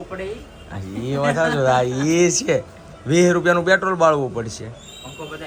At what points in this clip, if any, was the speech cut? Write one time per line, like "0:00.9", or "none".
none